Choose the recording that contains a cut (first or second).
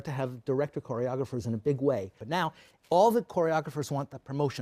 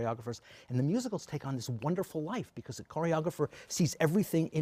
first